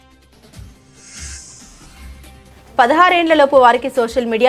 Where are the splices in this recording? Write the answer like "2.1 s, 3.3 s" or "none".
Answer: 2.1 s